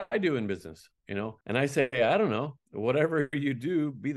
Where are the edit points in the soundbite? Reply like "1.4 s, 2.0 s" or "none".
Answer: 1.4 s

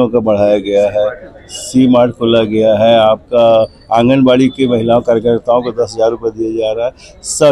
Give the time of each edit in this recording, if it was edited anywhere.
none

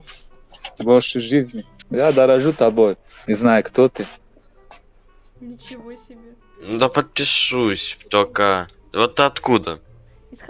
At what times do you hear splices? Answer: 1.8 s, 6.4 s

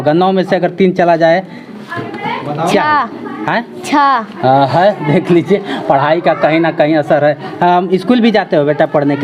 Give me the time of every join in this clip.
none

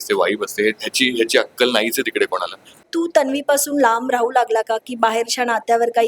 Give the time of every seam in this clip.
2.9 s

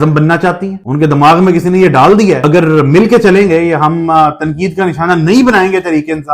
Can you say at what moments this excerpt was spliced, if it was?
none

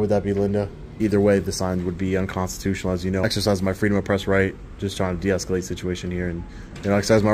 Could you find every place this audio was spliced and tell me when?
0.9 s, 3.2 s

